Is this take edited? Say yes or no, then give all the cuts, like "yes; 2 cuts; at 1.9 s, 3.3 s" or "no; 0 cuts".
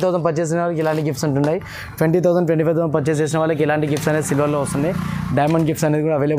no; 0 cuts